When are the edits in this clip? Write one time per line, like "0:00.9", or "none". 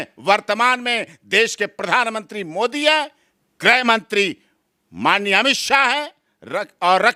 none